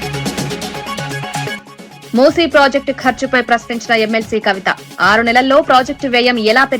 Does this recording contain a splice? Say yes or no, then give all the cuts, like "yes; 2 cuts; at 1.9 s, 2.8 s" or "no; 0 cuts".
yes; 1 cut; at 1.5 s